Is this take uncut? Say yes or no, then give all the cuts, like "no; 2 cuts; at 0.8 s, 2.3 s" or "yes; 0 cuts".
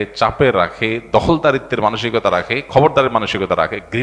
yes; 0 cuts